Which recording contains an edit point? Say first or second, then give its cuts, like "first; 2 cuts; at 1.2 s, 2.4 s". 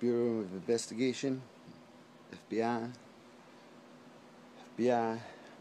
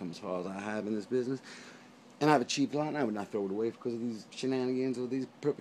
first; 1 cut; at 2.6 s